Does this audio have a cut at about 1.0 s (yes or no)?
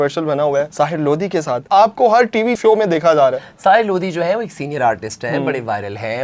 no